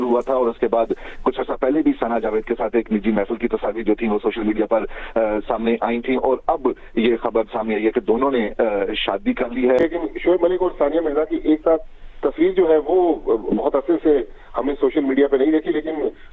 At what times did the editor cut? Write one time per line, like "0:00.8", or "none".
0:09.8